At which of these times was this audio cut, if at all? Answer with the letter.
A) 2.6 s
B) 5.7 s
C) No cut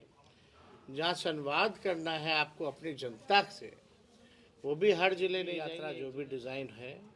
B